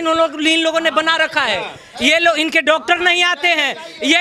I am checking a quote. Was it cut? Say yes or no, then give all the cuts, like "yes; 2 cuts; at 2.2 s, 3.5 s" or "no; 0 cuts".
no; 0 cuts